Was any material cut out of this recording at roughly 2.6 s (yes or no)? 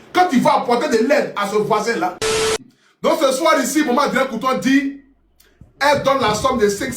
yes